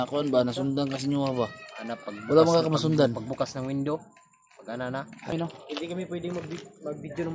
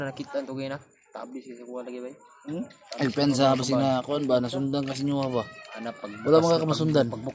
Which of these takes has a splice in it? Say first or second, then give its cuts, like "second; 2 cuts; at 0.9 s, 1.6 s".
first; 1 cut; at 5.3 s